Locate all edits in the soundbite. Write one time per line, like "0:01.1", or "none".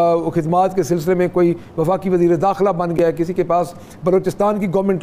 none